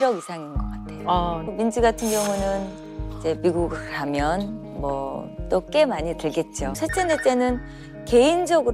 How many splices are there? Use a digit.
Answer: 2